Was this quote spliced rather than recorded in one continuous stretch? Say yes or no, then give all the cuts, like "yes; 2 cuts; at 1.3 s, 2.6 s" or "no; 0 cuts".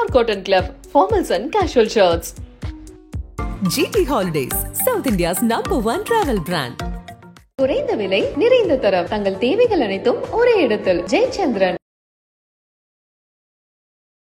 no; 0 cuts